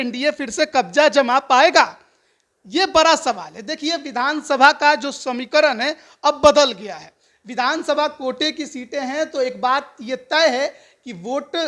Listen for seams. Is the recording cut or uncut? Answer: uncut